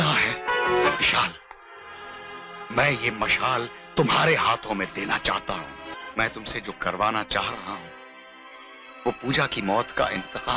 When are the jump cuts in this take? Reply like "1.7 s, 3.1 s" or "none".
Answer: 0.9 s, 6.0 s